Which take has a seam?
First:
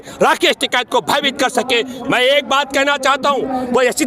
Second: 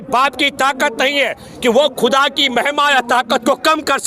first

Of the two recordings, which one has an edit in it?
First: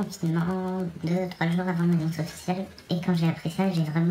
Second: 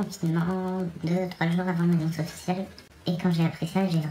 first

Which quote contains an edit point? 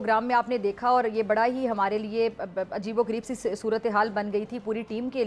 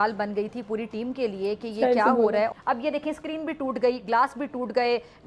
second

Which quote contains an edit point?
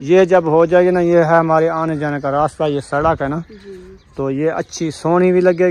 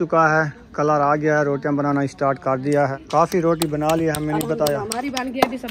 second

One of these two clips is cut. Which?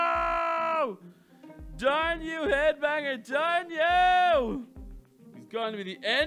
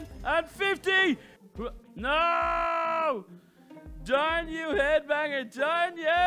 second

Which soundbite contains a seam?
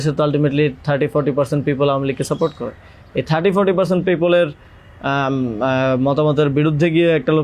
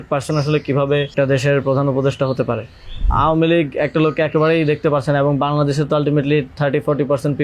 second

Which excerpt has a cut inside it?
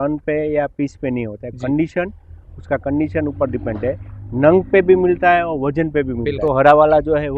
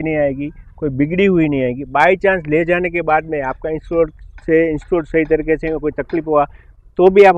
first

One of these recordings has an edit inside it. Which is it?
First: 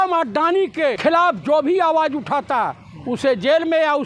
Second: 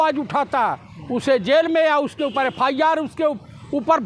first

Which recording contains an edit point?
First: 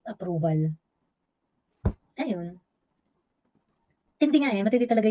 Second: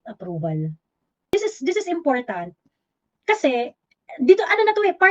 second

